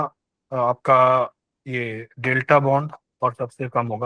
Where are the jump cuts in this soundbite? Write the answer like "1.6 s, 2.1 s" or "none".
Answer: 3.0 s